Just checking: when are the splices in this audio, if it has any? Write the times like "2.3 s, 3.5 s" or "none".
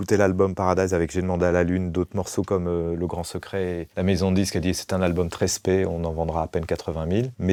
none